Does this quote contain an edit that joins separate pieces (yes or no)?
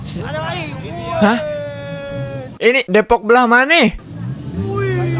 no